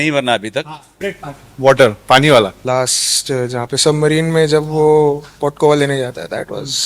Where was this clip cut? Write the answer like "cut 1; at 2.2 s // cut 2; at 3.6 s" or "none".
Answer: cut 1; at 1.0 s // cut 2; at 2.6 s